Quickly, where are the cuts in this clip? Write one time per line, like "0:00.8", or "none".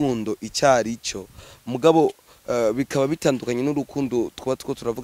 none